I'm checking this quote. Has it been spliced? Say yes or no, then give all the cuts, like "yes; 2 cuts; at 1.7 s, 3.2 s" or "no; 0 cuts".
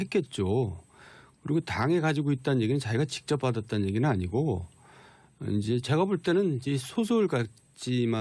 no; 0 cuts